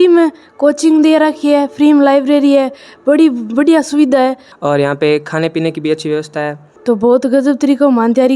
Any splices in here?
yes; 2 cuts; at 4.5 s, 6.7 s

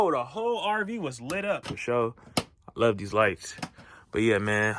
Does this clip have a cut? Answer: yes; 1 cut; at 1.7 s

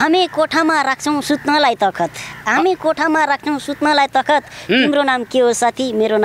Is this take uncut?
yes; 0 cuts

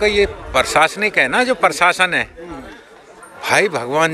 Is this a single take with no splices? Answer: yes; 0 cuts

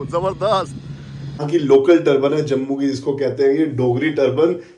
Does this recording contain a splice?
yes; 1 cut; at 1.4 s

